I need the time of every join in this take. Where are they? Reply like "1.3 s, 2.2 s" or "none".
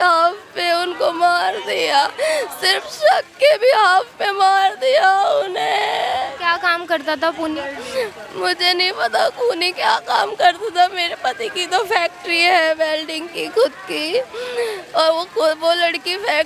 none